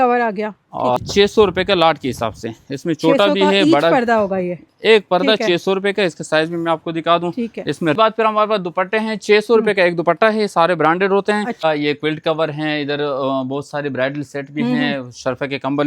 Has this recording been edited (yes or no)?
yes